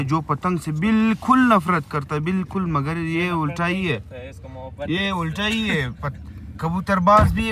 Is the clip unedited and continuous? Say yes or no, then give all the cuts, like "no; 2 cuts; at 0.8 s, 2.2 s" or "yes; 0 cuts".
yes; 0 cuts